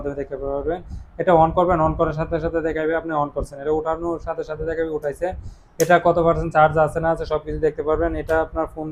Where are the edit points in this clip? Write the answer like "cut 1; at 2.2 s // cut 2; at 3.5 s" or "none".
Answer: none